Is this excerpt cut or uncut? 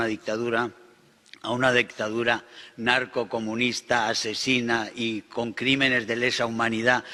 uncut